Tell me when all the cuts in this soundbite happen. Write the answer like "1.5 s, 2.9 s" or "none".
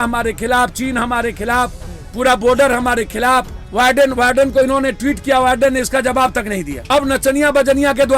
3.6 s, 6.9 s